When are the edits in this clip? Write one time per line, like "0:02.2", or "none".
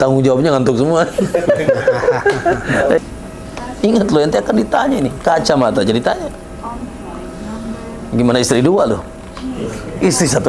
0:03.0